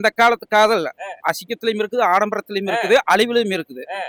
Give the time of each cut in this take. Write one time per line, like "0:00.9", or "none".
none